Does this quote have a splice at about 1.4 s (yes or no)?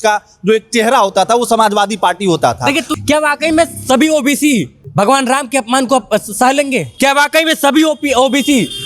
no